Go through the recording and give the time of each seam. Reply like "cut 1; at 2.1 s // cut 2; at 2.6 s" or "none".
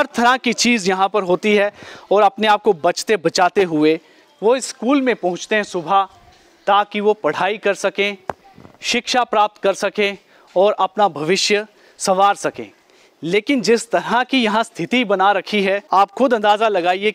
cut 1; at 15.8 s